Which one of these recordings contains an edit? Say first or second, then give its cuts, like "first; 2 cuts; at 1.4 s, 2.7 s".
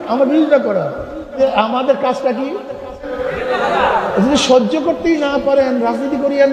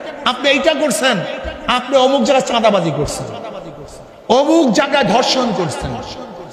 first; 2 cuts; at 1.3 s, 3.2 s